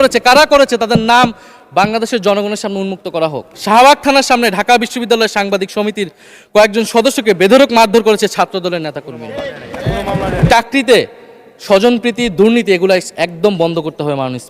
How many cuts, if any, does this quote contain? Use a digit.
2